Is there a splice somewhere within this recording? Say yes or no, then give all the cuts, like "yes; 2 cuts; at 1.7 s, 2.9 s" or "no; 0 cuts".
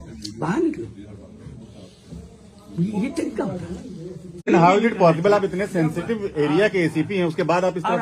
yes; 1 cut; at 4.5 s